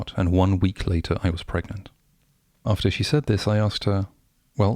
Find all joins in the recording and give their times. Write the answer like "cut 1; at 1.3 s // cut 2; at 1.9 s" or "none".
cut 1; at 2.6 s